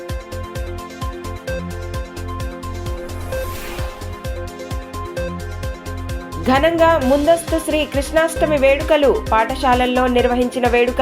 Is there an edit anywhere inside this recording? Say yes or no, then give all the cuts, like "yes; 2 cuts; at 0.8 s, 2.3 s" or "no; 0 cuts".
no; 0 cuts